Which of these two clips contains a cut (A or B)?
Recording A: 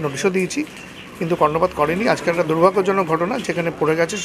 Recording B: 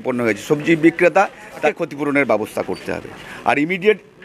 B